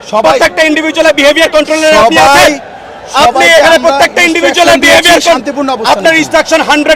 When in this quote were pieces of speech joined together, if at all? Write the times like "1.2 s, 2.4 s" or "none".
none